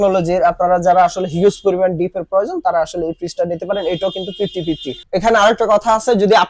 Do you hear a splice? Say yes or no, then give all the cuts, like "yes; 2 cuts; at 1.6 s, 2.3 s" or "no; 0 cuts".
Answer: yes; 1 cut; at 5.0 s